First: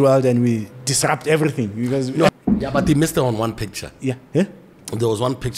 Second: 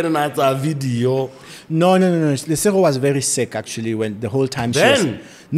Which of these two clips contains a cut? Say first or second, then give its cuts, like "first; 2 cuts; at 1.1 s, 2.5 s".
first; 1 cut; at 2.3 s